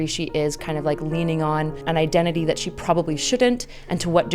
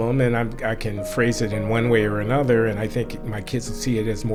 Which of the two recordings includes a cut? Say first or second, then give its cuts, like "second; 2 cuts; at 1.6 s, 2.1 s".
first; 1 cut; at 1.8 s